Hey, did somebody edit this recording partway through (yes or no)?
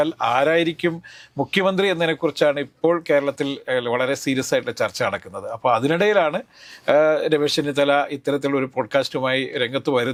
no